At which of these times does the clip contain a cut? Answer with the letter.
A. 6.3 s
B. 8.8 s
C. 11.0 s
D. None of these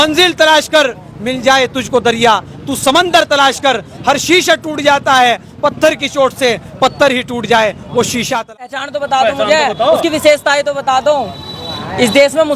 B